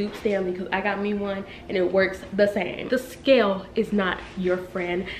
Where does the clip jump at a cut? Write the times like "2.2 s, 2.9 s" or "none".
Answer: 2.8 s